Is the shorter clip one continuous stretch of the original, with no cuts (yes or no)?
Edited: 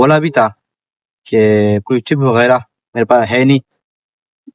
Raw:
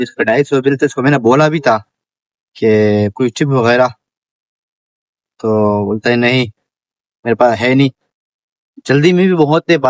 no